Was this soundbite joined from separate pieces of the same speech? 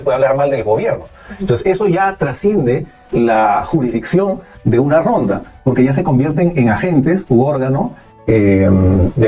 no; 0 cuts

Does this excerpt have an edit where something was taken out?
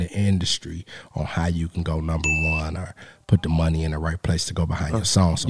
no; 0 cuts

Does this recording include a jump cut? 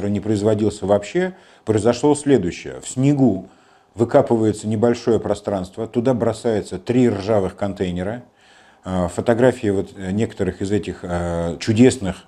no; 0 cuts

